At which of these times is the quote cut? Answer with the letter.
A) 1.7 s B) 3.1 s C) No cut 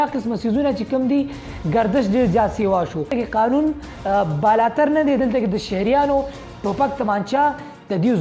B